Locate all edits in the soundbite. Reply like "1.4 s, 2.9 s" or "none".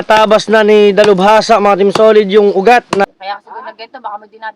3.1 s